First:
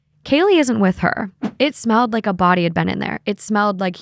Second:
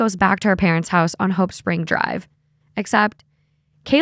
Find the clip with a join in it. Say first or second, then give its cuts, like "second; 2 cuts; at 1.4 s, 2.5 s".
first; 1 cut; at 1.5 s